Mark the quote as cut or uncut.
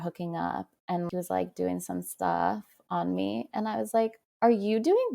cut